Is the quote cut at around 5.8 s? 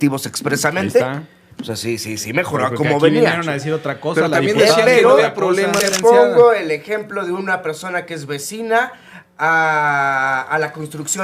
yes; 1 cut; at 5.8 s

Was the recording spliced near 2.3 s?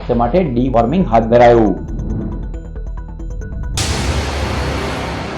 no; 1 cut; at 3.6 s

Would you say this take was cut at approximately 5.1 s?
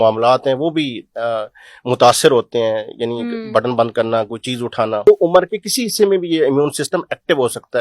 yes; 1 cut; at 5.1 s

